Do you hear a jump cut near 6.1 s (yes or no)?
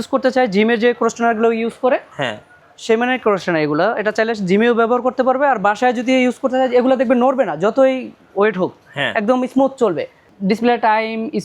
no